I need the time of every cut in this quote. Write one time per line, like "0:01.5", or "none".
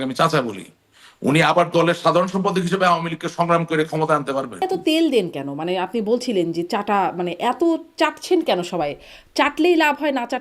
0:04.6